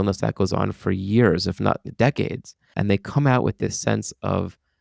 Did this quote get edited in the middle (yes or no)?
yes